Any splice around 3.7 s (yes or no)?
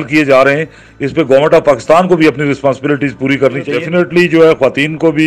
yes